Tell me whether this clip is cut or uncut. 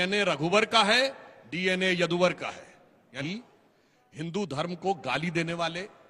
cut